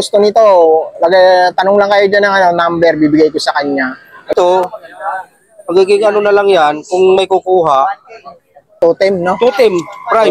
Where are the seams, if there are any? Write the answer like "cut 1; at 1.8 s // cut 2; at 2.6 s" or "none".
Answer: cut 1; at 4.3 s // cut 2; at 8.8 s